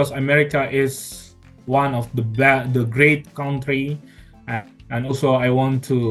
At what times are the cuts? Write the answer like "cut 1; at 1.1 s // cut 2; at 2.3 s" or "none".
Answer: none